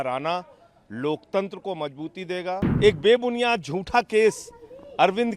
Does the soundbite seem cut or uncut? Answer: cut